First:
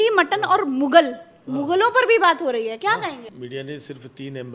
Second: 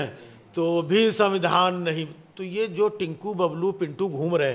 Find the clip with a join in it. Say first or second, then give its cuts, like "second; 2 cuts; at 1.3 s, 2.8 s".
first; 1 cut; at 3.3 s